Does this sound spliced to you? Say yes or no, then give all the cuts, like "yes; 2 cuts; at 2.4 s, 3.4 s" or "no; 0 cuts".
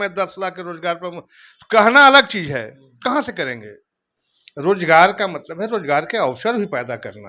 no; 0 cuts